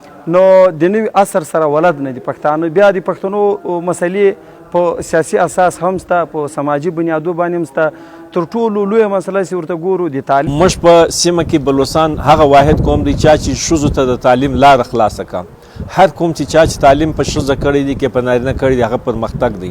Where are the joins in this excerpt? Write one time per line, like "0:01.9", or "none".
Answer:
0:10.5